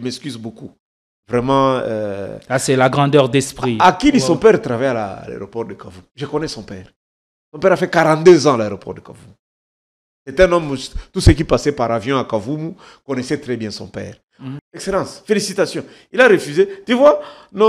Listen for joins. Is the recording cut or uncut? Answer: cut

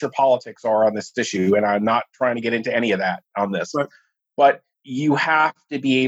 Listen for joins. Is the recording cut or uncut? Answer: uncut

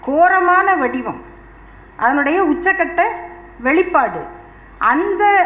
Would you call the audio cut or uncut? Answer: uncut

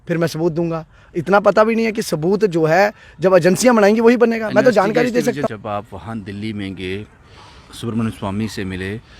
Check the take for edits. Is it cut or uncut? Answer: cut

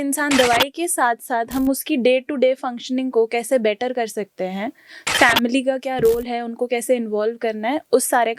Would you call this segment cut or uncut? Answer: uncut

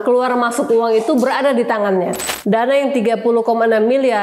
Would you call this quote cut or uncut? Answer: cut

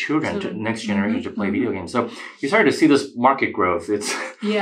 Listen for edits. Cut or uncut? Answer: uncut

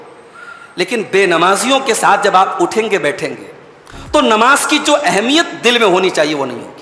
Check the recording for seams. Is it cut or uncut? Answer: uncut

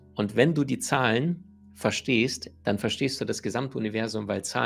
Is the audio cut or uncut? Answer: uncut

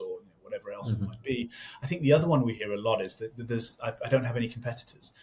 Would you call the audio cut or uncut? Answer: uncut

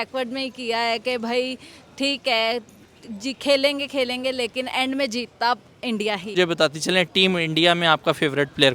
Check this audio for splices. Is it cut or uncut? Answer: cut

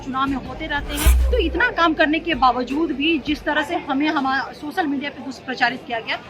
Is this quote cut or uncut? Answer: cut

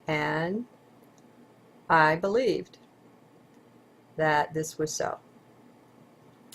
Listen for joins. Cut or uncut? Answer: uncut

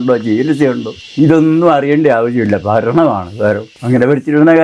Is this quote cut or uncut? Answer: cut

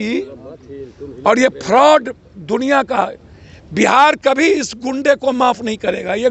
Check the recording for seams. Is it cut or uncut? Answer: uncut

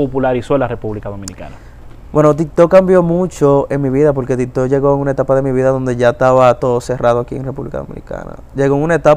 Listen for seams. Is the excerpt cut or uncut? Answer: uncut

